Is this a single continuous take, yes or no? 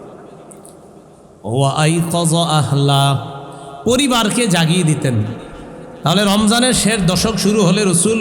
yes